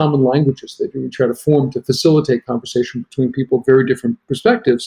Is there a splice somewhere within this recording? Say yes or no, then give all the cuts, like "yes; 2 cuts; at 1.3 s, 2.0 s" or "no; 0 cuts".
no; 0 cuts